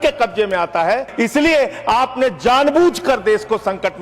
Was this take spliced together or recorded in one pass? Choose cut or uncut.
cut